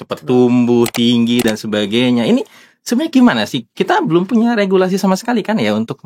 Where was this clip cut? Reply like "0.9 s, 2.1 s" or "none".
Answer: none

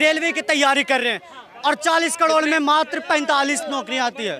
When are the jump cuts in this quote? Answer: none

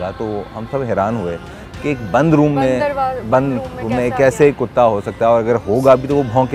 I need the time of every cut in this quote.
none

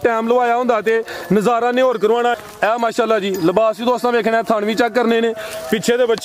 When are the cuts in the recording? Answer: 2.4 s

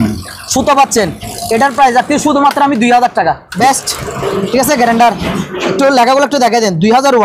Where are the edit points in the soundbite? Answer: 3.5 s

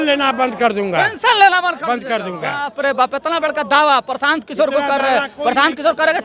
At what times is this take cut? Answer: none

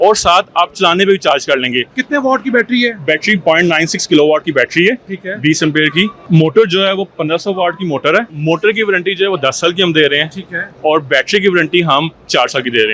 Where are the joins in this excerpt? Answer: 2.0 s, 6.2 s, 8.3 s

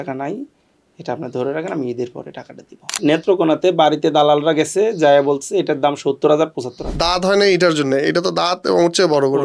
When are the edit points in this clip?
2.9 s, 6.9 s

